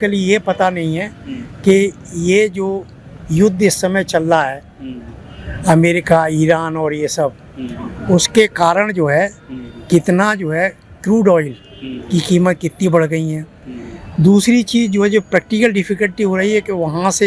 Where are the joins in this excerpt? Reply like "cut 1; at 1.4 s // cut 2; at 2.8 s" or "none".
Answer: none